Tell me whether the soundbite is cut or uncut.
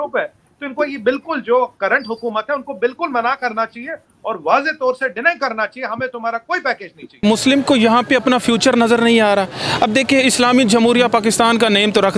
cut